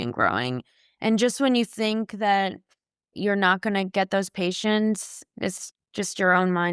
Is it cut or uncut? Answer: cut